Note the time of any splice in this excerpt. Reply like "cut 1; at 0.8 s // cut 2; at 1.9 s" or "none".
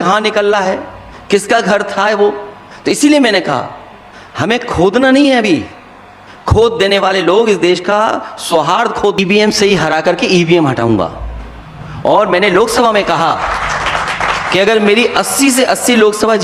cut 1; at 9.2 s